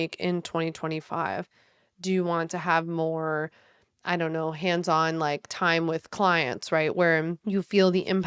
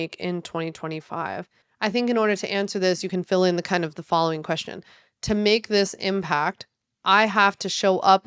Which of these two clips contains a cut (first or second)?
second